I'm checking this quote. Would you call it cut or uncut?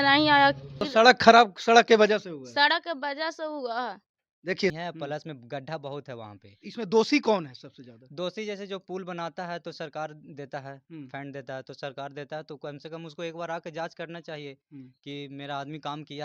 cut